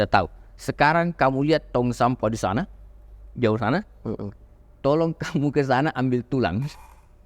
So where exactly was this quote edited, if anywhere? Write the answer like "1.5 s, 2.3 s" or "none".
none